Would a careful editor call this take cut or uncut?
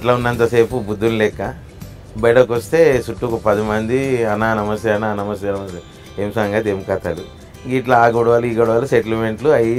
uncut